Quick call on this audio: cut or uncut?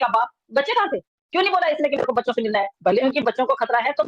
cut